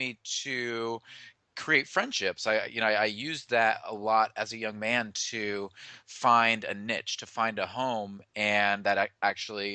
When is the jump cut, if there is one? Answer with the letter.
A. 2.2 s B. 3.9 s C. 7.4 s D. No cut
B